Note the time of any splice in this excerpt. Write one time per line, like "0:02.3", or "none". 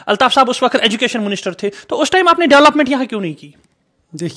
none